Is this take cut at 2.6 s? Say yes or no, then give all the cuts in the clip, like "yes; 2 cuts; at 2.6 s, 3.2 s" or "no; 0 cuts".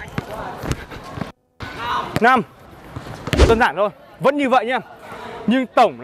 no; 0 cuts